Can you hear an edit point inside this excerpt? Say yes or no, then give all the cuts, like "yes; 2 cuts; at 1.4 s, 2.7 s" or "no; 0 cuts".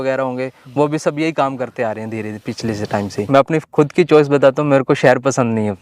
yes; 1 cut; at 3.2 s